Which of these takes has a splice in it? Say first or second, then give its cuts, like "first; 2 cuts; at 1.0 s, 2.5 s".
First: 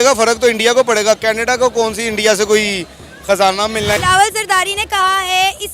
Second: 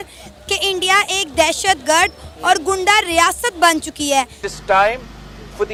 first; 1 cut; at 3.7 s